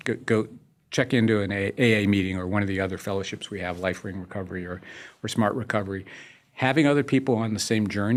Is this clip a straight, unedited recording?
yes; 0 cuts

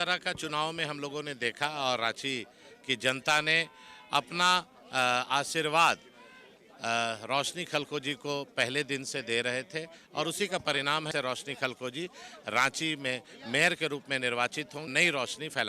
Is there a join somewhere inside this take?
yes; 2 cuts; at 11.1 s, 14.9 s

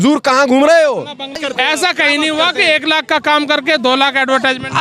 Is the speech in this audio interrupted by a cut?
yes; 1 cut; at 1.4 s

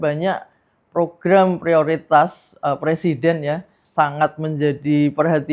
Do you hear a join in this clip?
yes; 1 cut; at 3.8 s

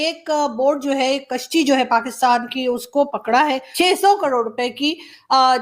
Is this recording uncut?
no; 1 cut; at 3.7 s

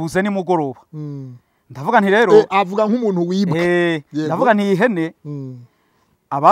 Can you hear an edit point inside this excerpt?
no; 0 cuts

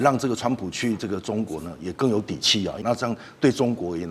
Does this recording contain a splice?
yes; 1 cut; at 2.8 s

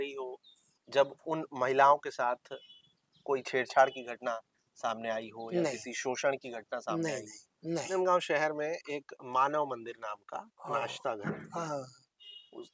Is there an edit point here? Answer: yes; 1 cut; at 7.9 s

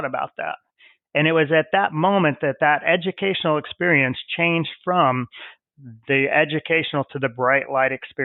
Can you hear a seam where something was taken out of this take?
no; 0 cuts

